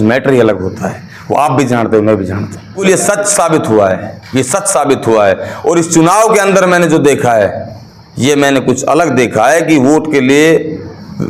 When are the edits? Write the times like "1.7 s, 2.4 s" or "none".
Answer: none